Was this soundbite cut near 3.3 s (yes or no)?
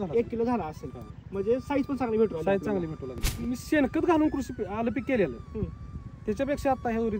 yes